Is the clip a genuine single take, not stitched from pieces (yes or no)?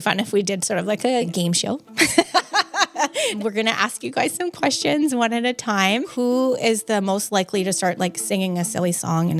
no